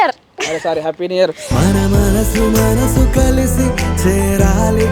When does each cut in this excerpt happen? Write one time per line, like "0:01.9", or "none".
none